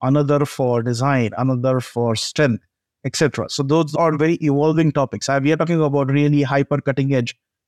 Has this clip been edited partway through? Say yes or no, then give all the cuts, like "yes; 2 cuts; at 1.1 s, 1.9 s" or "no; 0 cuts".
yes; 1 cut; at 4.0 s